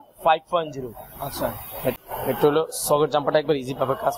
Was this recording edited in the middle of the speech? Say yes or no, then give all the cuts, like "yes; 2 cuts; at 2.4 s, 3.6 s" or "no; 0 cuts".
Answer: yes; 1 cut; at 2.0 s